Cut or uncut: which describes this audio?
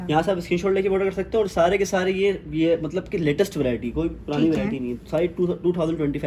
uncut